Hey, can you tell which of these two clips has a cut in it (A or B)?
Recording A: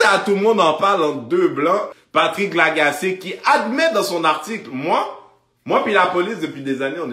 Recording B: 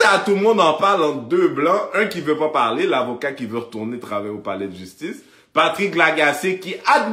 A